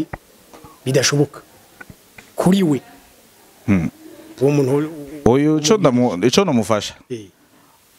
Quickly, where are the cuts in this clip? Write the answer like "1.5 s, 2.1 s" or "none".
none